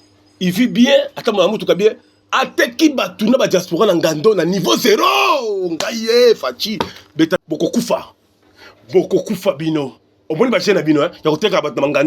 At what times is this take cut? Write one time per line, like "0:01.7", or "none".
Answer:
0:07.4